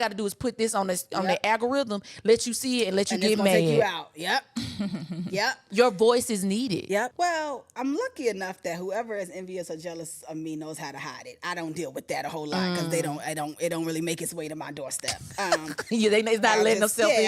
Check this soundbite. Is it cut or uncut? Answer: cut